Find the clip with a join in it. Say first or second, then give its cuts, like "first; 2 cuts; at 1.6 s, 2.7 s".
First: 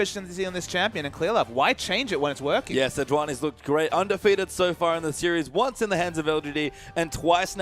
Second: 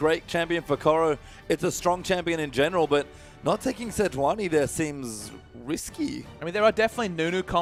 first; 1 cut; at 3.6 s